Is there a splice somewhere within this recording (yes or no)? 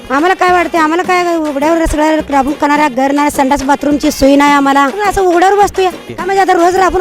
yes